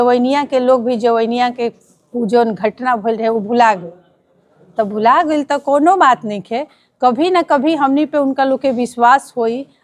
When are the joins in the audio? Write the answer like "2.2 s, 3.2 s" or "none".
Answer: none